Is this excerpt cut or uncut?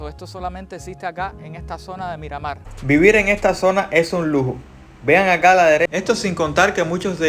cut